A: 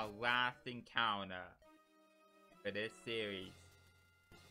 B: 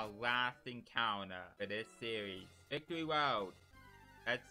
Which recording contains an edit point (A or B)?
B